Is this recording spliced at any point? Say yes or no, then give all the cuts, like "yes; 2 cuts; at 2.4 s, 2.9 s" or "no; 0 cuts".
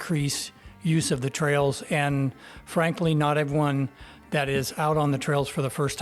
no; 0 cuts